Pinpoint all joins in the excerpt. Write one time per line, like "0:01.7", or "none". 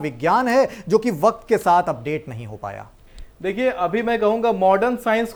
none